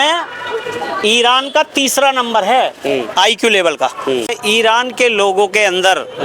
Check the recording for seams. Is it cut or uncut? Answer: cut